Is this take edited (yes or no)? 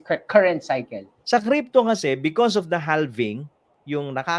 yes